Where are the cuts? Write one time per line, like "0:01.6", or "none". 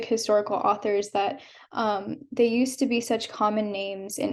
none